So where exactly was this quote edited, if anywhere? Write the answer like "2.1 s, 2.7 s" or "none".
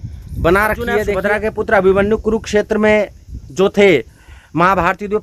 1.1 s